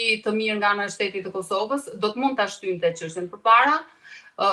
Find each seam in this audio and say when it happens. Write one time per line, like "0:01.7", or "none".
none